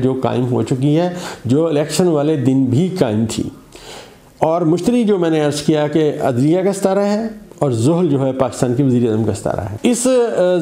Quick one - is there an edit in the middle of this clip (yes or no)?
yes